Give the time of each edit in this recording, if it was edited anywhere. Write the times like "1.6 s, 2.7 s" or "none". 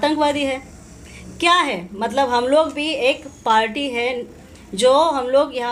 none